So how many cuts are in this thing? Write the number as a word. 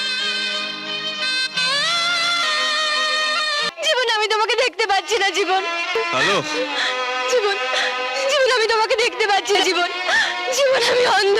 one